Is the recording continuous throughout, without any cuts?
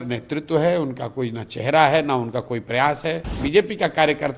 no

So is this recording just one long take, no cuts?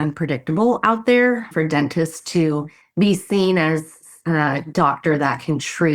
no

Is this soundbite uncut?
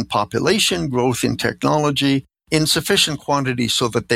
no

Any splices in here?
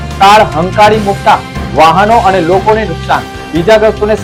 no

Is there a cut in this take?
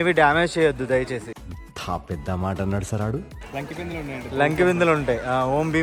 no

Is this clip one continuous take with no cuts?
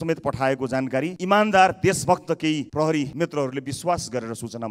no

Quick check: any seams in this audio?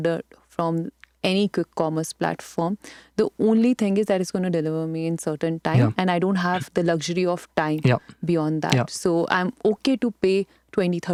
no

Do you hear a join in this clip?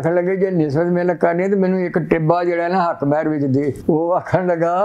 yes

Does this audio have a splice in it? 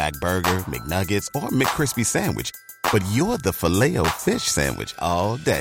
no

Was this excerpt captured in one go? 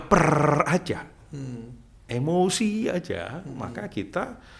yes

